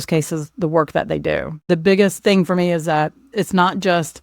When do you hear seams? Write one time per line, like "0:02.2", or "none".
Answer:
0:01.5
0:02.2
0:03.3